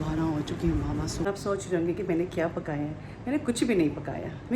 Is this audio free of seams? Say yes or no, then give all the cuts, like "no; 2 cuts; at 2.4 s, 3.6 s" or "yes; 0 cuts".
no; 1 cut; at 1.3 s